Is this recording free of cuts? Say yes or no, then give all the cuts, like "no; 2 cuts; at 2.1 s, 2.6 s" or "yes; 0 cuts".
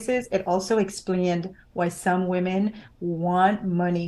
yes; 0 cuts